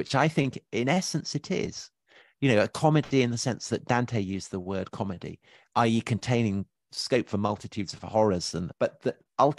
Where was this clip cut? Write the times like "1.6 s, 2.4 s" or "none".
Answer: 6.9 s, 8.7 s